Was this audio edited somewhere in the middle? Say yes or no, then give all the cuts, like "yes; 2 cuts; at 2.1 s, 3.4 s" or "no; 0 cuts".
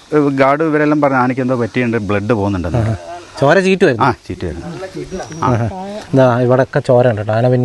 no; 0 cuts